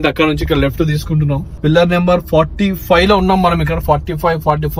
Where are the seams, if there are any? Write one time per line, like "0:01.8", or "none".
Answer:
0:01.5